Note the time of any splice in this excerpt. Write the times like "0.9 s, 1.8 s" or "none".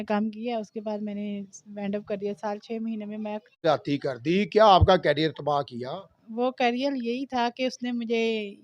3.6 s